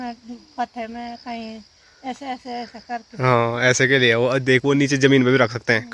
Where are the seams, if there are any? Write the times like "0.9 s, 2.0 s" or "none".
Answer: none